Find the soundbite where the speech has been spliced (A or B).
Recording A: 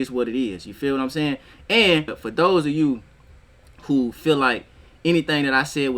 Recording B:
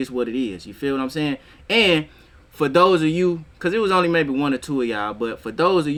A